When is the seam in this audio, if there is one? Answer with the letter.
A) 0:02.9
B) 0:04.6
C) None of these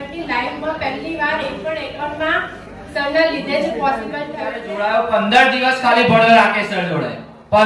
B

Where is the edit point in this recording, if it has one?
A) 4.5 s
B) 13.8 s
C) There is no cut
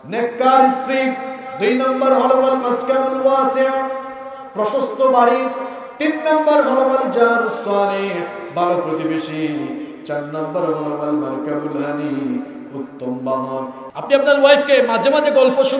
B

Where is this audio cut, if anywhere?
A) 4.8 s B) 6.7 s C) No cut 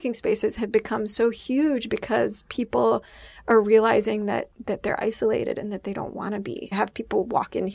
B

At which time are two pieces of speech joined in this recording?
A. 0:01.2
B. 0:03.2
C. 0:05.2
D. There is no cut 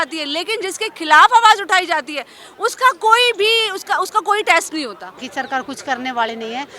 C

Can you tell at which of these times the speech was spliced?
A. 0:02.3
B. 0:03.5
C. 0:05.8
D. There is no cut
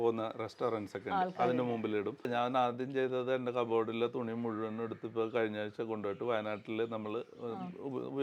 A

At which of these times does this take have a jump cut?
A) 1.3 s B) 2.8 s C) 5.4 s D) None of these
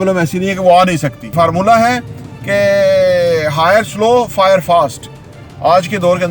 A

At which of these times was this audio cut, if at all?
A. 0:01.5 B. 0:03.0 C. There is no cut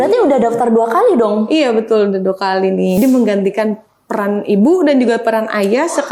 B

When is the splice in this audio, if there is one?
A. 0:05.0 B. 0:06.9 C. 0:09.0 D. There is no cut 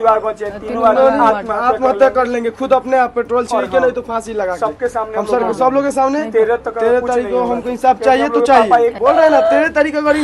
C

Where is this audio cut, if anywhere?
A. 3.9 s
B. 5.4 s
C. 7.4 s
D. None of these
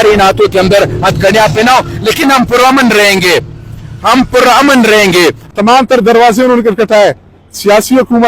B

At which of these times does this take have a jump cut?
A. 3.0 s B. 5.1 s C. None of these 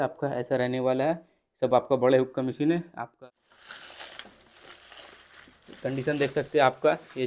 A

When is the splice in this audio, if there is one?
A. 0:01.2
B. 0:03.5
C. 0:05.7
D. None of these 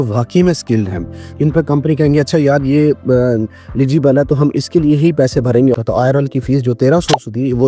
C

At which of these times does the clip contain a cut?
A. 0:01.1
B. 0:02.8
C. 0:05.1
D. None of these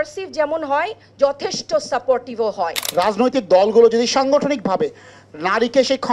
B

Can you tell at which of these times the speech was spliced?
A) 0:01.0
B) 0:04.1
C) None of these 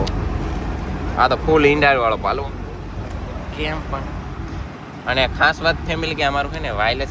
C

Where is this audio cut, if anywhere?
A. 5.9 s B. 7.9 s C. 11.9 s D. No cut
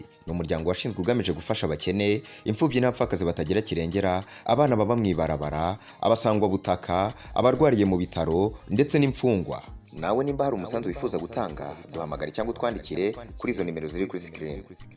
D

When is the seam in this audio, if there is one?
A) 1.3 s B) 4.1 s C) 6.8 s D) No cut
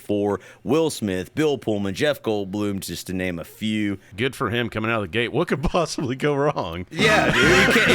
B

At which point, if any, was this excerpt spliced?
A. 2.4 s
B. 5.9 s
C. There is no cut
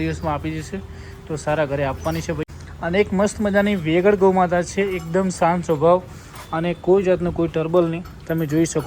A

